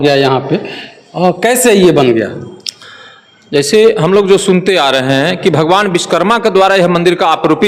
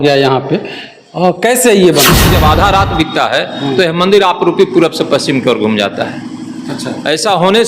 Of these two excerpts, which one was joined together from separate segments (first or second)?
second